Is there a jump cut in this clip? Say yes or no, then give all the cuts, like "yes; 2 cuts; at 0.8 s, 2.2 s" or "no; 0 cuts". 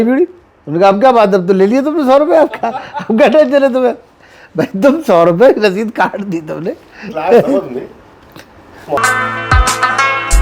no; 0 cuts